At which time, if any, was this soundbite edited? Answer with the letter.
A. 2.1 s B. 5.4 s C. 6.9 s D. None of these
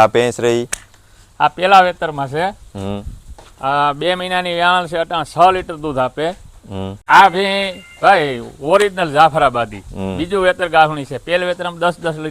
C